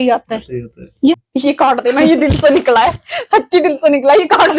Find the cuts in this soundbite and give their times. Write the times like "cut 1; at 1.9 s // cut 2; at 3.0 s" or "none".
cut 1; at 1.2 s